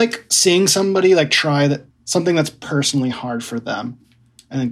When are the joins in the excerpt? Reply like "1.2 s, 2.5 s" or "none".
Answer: 1.9 s